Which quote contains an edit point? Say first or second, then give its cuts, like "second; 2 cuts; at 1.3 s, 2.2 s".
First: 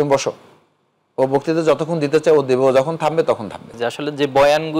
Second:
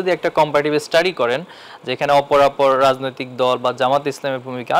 first; 1 cut; at 3.8 s